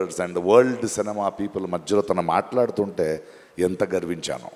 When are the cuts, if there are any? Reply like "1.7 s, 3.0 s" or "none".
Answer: none